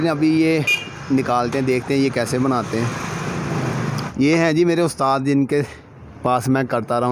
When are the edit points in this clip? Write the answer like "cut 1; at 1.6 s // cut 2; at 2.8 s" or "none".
cut 1; at 3.9 s